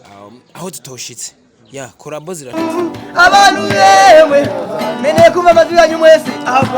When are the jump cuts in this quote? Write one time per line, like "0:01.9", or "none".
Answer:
0:02.5